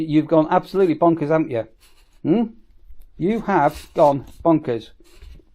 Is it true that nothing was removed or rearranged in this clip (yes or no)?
yes